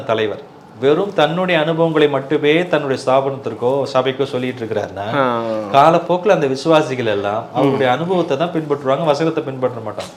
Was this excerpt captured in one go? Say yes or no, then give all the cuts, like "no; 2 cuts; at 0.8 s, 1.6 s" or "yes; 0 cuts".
yes; 0 cuts